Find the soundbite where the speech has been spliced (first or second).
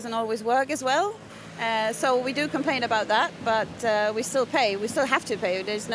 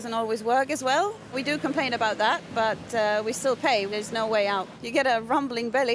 second